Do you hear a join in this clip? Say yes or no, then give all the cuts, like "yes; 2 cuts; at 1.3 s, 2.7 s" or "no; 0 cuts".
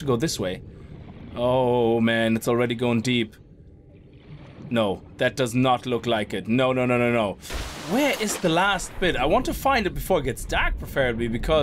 yes; 1 cut; at 7.5 s